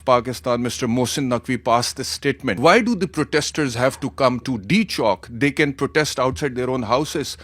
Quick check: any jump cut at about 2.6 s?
yes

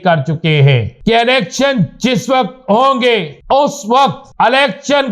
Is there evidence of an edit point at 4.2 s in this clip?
yes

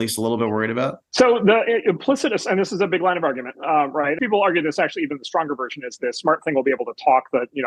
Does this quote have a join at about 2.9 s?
no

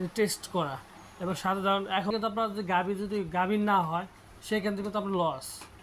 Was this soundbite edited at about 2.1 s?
yes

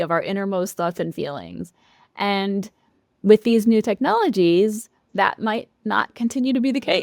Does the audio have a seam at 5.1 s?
yes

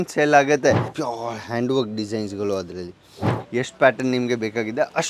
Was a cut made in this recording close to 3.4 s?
yes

